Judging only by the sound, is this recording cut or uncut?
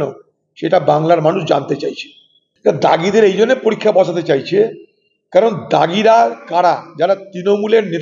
cut